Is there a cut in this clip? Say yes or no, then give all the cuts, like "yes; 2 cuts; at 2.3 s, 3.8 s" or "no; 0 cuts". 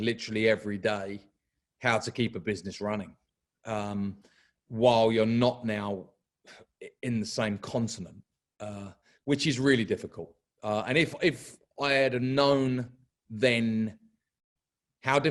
no; 0 cuts